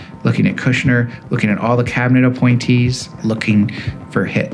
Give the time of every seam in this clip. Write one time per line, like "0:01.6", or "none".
0:03.1

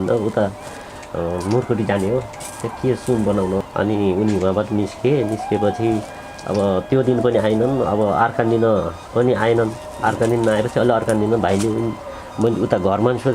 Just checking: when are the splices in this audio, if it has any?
0:03.6

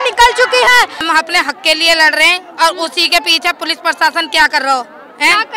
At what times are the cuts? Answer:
0:01.1

